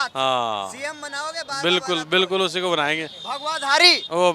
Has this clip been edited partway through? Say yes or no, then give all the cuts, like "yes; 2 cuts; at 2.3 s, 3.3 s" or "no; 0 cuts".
no; 0 cuts